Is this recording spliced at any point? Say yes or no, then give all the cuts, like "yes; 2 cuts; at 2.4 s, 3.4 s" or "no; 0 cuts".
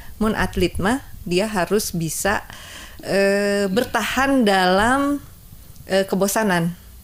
no; 0 cuts